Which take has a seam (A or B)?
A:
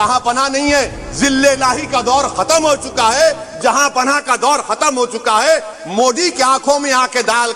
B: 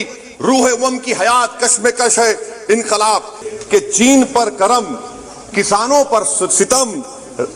B